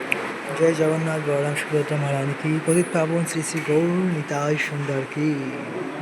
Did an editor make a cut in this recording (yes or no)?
no